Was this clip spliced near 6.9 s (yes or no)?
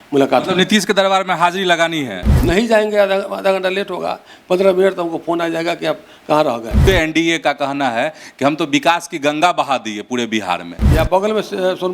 yes